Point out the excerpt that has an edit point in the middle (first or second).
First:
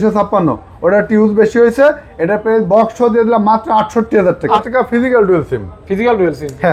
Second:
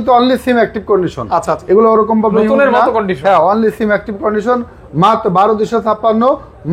first